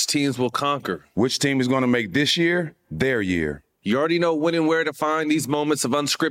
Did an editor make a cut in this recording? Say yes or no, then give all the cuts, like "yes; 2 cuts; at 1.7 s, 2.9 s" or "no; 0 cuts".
yes; 1 cut; at 1.0 s